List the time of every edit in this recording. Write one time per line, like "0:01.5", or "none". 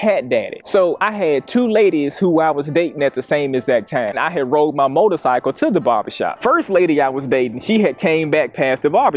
0:04.2
0:06.3